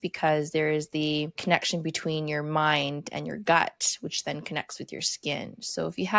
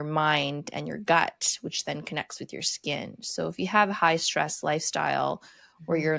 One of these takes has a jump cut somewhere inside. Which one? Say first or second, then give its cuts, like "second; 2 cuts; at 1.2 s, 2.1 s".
first; 1 cut; at 1.4 s